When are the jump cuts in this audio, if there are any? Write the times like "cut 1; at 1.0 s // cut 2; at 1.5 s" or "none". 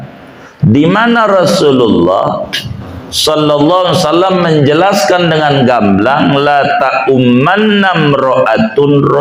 none